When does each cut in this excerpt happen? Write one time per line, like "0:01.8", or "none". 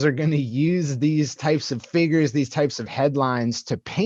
none